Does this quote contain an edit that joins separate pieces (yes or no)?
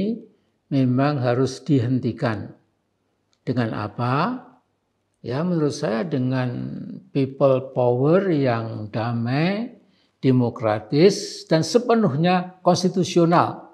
no